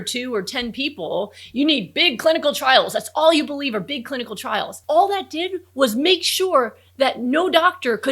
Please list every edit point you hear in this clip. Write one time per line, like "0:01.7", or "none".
0:04.7